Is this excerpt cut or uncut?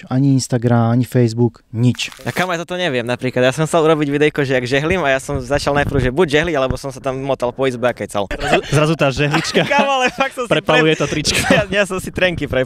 cut